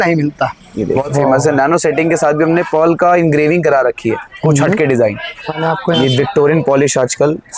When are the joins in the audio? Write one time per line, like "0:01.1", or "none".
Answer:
0:01.1
0:05.6